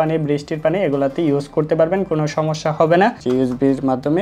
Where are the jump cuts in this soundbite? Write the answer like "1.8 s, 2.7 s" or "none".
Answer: 3.2 s